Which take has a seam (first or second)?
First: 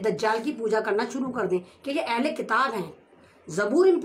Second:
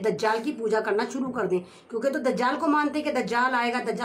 first